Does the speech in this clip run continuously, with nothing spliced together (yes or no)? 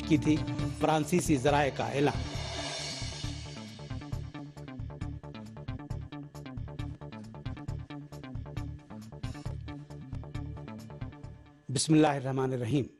yes